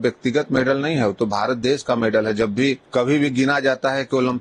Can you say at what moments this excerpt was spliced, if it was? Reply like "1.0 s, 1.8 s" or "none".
2.8 s